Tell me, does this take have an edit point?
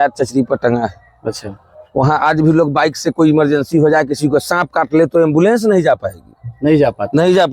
no; 0 cuts

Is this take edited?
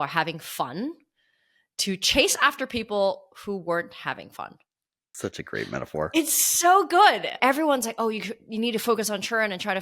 yes; 1 cut; at 7.3 s

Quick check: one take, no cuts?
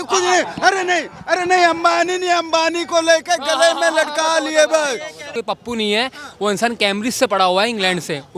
no; 1 cut; at 5.3 s

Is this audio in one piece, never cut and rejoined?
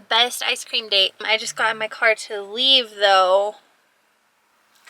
no; 1 cut; at 1.2 s

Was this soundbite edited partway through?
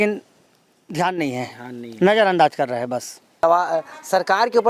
yes; 1 cut; at 3.4 s

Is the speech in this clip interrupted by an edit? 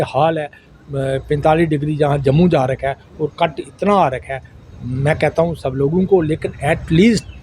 no; 0 cuts

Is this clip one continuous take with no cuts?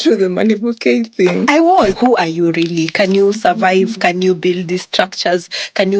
no; 1 cut; at 1.9 s

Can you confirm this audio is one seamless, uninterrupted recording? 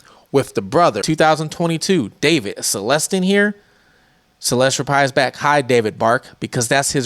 no; 1 cut; at 1.0 s

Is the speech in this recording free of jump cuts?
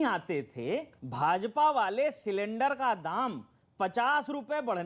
no; 1 cut; at 1.0 s

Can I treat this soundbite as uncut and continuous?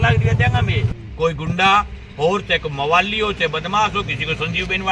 no; 1 cut; at 0.9 s

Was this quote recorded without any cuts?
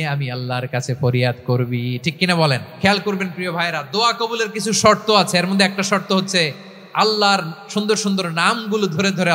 no; 1 cut; at 2.7 s

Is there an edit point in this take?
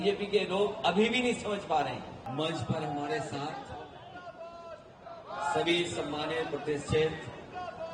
yes; 1 cut; at 2.1 s

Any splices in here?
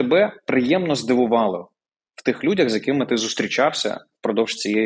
no; 0 cuts

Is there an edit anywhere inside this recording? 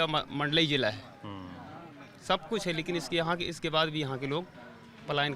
no; 0 cuts

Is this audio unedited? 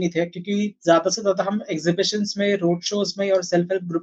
yes; 0 cuts

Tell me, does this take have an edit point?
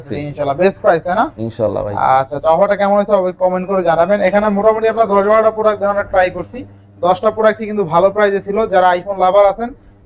no; 0 cuts

